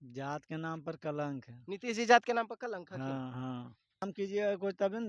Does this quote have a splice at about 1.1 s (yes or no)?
no